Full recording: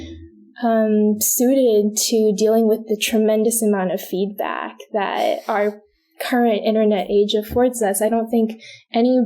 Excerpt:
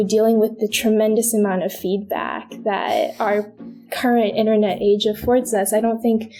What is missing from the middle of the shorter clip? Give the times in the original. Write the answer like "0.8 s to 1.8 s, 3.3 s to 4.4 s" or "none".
none